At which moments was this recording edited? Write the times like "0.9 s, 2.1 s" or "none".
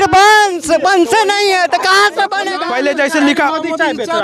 2.5 s